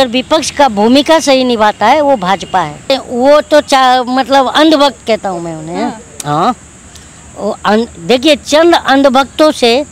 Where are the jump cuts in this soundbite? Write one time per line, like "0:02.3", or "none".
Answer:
0:02.9